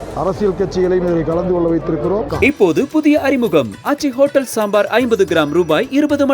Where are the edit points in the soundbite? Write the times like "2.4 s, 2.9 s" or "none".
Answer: 2.3 s